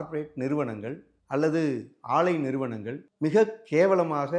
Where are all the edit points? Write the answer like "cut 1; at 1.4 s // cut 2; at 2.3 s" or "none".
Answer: cut 1; at 1.1 s